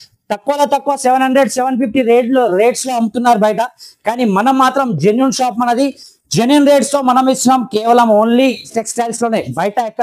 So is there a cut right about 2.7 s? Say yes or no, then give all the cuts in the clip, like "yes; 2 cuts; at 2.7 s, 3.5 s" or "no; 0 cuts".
no; 1 cut; at 8.7 s